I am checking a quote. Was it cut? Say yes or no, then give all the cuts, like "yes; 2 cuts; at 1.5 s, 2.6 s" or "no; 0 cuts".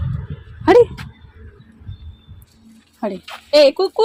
no; 0 cuts